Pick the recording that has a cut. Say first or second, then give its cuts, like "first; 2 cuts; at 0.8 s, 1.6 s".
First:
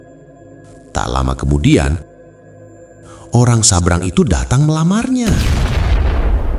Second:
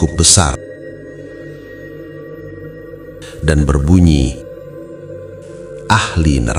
first; 1 cut; at 5.3 s